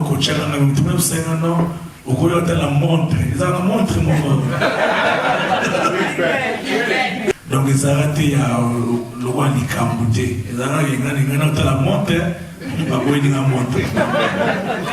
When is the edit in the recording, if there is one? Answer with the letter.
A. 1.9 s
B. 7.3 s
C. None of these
B